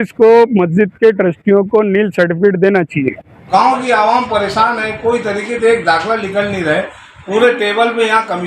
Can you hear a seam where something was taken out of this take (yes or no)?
yes